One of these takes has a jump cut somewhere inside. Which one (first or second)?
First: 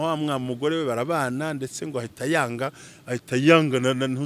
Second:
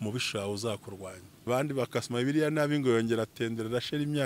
second